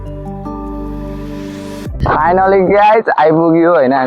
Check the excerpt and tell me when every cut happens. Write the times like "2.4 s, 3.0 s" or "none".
1.9 s